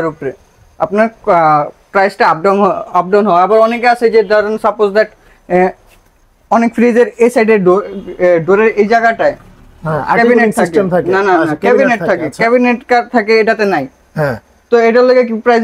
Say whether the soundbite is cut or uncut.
uncut